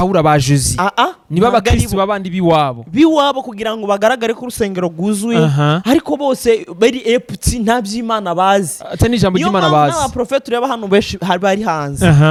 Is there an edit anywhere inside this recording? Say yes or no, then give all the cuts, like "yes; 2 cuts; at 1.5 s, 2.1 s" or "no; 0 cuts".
no; 0 cuts